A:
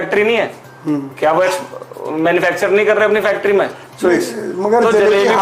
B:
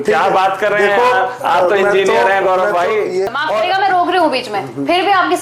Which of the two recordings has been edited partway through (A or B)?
B